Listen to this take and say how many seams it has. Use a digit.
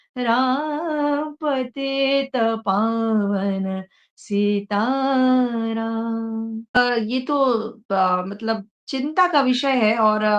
1